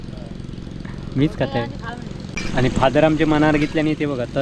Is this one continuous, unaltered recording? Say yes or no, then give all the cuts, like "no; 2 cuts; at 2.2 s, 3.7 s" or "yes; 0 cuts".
no; 1 cut; at 2.4 s